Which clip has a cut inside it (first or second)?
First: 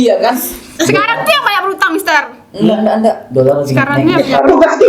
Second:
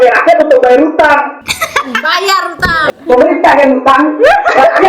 second